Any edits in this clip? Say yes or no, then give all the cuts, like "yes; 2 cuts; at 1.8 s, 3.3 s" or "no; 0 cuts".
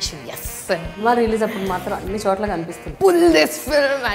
yes; 2 cuts; at 1.0 s, 2.9 s